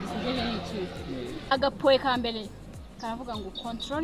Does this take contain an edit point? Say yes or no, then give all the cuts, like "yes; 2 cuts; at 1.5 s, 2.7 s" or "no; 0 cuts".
yes; 1 cut; at 1.5 s